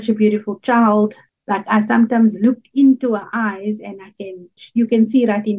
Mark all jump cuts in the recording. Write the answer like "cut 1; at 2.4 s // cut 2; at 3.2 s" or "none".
cut 1; at 1.2 s // cut 2; at 4.6 s